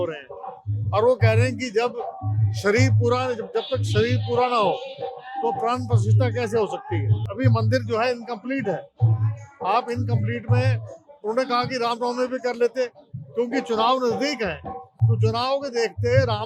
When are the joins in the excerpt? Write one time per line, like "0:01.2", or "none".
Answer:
none

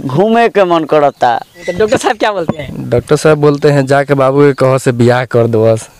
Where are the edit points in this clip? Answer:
0:01.6

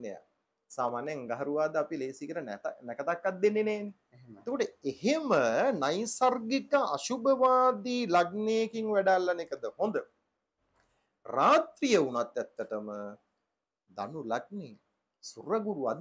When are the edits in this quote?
none

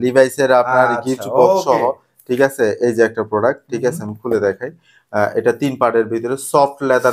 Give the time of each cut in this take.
none

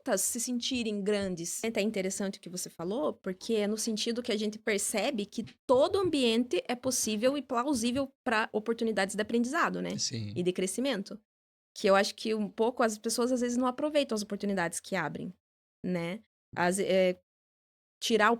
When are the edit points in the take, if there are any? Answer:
0:01.7

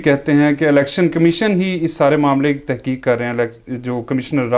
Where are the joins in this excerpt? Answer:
none

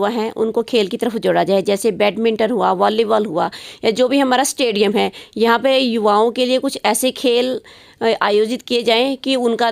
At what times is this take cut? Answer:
none

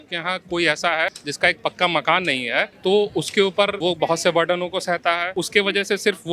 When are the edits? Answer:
0:01.2
0:02.7
0:03.8
0:05.3

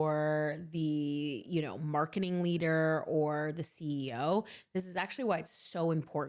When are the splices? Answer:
none

